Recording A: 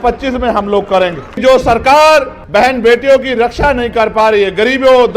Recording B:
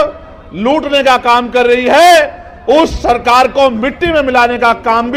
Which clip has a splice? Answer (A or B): A